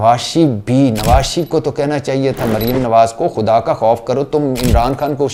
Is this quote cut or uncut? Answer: uncut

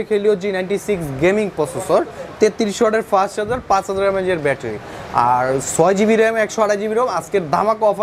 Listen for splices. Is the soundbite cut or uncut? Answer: uncut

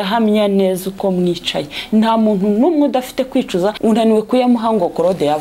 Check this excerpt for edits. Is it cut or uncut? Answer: cut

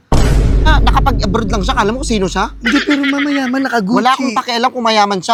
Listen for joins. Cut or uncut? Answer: uncut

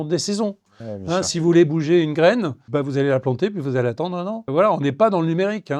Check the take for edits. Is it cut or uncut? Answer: uncut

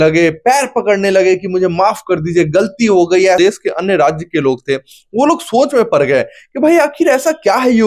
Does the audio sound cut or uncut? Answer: cut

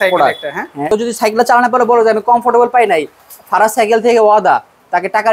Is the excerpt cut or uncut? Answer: cut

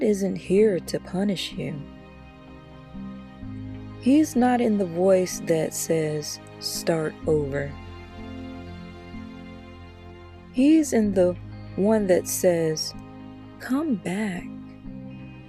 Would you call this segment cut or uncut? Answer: cut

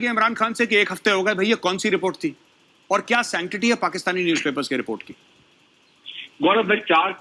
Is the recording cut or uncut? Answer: uncut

